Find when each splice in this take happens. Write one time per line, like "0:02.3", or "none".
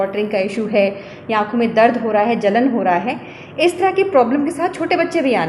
none

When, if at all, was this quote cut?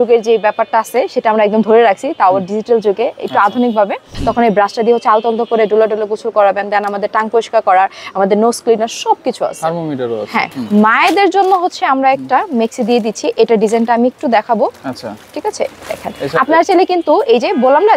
0:04.1
0:10.5

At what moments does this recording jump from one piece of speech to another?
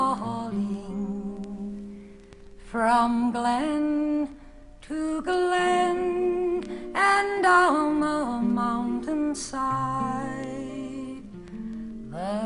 none

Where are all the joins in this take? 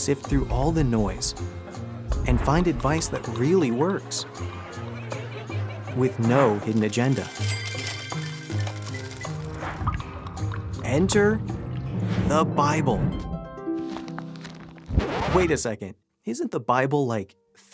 none

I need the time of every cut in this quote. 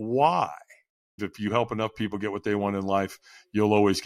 0:01.2

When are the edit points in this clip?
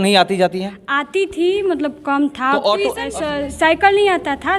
0:03.1

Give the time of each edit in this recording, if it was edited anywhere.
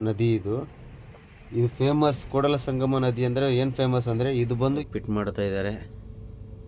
0:04.8

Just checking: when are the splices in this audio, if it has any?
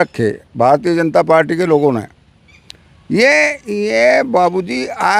none

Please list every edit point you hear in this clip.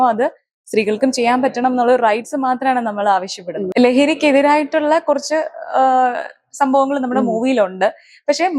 0:03.7

